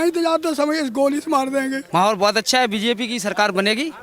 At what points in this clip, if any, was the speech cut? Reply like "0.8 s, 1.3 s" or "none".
1.8 s